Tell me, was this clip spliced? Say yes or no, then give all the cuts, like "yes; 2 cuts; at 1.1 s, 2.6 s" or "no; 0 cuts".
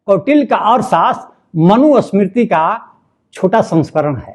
no; 0 cuts